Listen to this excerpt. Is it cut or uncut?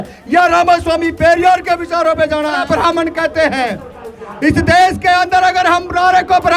cut